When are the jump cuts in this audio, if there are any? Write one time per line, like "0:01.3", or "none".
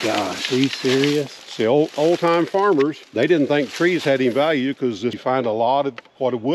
0:01.4
0:03.0
0:05.2